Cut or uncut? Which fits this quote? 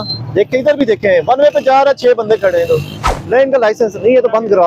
uncut